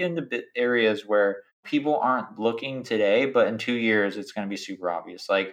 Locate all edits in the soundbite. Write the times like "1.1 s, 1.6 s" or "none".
1.5 s